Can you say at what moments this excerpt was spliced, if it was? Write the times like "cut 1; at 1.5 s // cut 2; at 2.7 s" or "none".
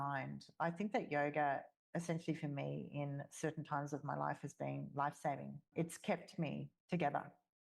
cut 1; at 5.6 s // cut 2; at 6.7 s